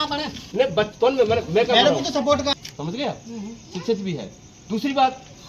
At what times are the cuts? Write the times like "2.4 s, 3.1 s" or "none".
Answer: 2.5 s

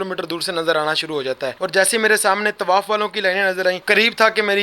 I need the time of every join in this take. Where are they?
1.5 s, 3.8 s

